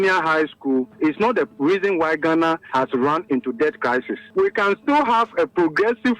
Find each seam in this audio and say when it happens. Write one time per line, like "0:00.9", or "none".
0:01.1
0:02.6
0:04.2